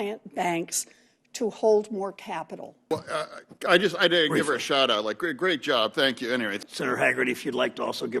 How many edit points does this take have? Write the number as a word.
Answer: two